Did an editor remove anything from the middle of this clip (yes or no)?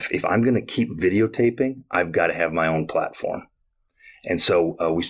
no